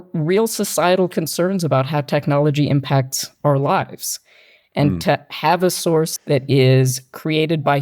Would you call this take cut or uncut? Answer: cut